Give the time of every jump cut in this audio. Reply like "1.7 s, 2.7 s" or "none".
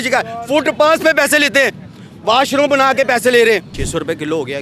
3.7 s